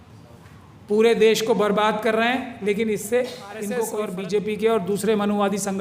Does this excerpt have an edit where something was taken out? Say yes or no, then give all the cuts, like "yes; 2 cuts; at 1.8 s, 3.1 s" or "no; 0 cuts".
yes; 1 cut; at 3.8 s